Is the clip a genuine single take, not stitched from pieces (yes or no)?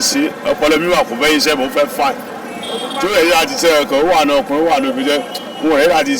yes